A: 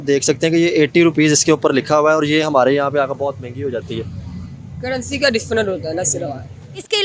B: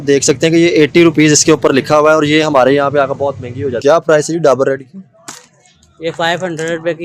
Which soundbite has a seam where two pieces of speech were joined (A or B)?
B